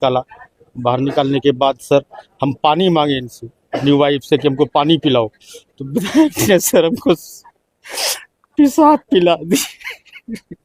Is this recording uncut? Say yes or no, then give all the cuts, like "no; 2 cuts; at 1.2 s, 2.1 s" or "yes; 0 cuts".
yes; 0 cuts